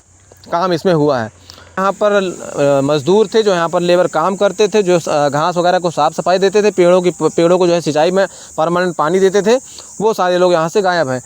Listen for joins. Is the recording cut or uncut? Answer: cut